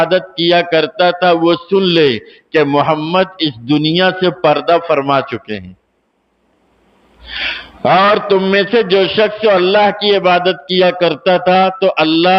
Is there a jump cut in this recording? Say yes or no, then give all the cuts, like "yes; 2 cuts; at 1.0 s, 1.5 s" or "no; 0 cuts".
no; 0 cuts